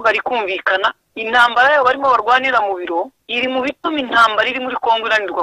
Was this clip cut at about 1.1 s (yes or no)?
no